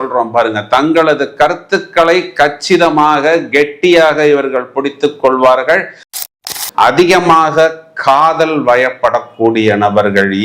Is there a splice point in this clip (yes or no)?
yes